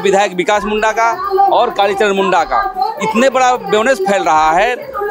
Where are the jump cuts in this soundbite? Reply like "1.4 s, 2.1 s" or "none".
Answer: none

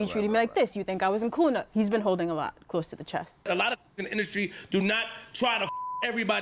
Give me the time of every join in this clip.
3.5 s

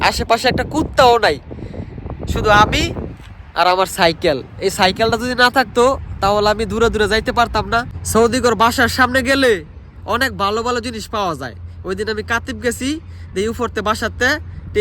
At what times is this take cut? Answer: 8.0 s

